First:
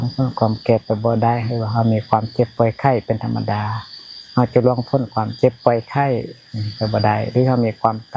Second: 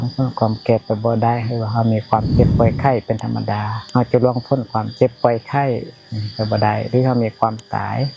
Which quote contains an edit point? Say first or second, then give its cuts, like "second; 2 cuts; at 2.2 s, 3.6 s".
second; 1 cut; at 3.7 s